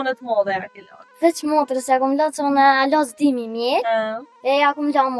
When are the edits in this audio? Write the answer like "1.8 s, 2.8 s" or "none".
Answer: 4.2 s